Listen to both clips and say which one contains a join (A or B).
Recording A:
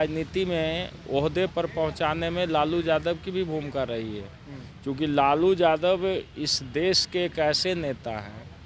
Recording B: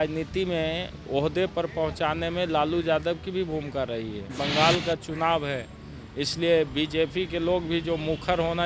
B